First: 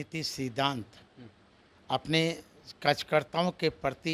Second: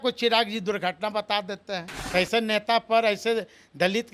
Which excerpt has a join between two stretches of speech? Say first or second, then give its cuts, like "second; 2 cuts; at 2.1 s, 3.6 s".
second; 1 cut; at 1.9 s